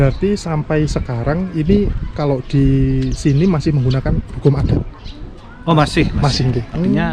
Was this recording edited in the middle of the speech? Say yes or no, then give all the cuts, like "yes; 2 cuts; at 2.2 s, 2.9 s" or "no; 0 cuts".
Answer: no; 0 cuts